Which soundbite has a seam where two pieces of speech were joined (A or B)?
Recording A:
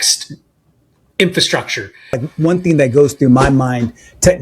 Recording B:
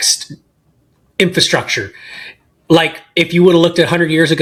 A